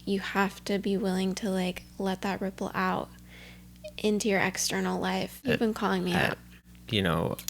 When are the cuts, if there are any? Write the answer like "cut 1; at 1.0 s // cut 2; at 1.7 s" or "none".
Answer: cut 1; at 5.3 s